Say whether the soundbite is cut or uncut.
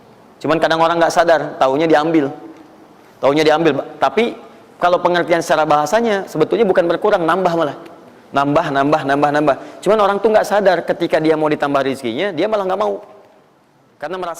uncut